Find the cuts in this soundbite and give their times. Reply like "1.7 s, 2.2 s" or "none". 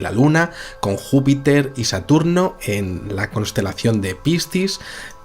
3.5 s